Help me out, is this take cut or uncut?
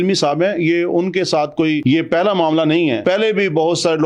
cut